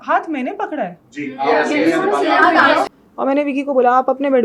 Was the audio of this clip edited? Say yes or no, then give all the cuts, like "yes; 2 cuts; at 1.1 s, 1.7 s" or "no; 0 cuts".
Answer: yes; 1 cut; at 3.0 s